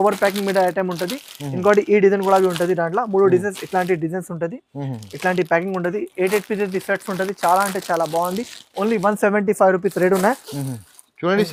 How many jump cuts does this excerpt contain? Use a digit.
0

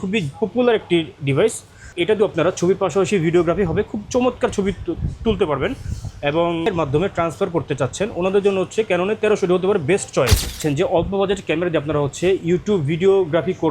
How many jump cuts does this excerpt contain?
3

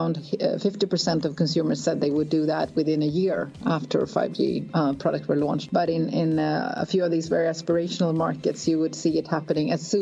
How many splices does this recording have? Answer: 1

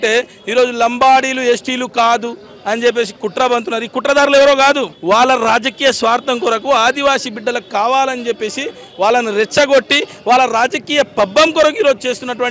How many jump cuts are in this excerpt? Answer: 0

